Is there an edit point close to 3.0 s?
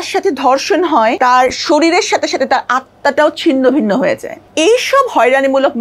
no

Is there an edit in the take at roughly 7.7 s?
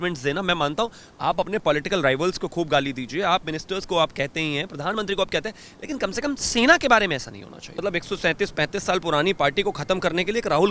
yes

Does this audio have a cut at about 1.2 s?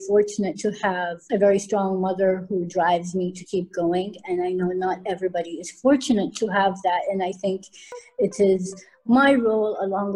yes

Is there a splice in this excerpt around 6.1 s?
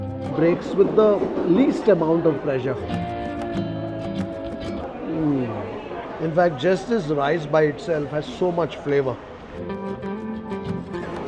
yes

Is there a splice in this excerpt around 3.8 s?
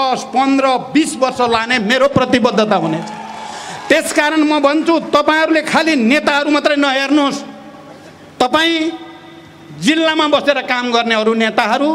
no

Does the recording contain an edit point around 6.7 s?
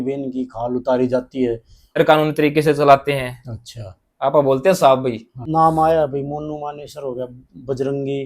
no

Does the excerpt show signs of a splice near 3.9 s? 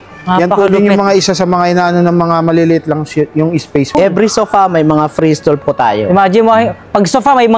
yes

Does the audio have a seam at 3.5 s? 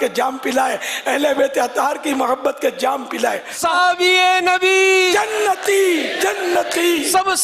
yes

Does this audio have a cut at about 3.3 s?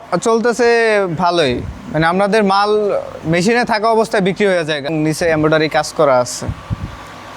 no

